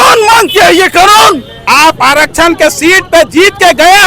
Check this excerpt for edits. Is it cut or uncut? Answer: cut